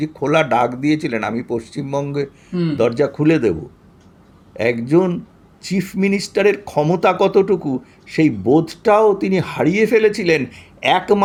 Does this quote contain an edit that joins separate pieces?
no; 0 cuts

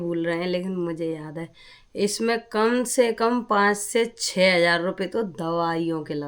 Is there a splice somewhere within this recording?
no; 0 cuts

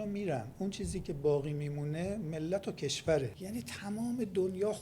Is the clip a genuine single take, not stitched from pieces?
no; 1 cut; at 3.4 s

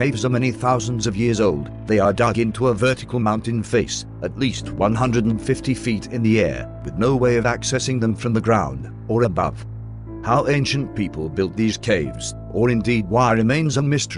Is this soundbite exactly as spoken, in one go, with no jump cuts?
yes; 0 cuts

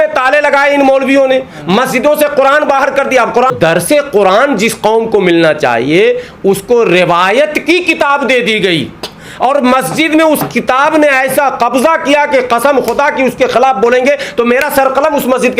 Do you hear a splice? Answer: yes; 1 cut; at 3.5 s

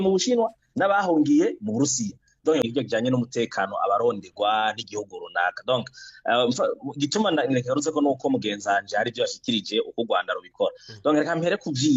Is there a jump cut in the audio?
yes; 1 cut; at 2.7 s

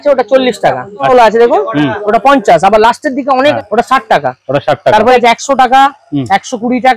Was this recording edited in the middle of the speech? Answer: yes; 3 cuts; at 1.1 s, 3.5 s, 5.2 s

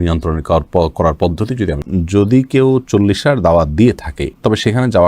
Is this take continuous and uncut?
no; 1 cut; at 1.8 s

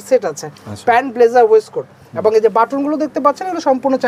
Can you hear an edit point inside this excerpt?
no; 0 cuts

